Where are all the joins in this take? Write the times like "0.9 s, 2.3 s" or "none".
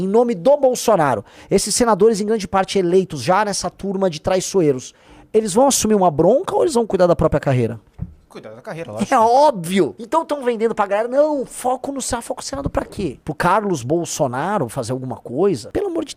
9.9 s